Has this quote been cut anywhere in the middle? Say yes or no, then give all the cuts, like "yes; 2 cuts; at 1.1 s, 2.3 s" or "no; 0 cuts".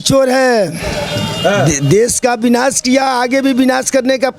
no; 0 cuts